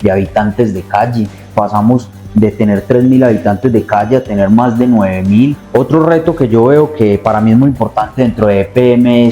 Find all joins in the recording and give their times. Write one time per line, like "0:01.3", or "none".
0:01.5
0:05.6